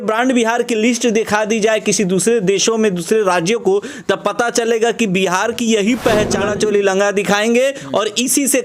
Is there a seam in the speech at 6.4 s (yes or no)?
yes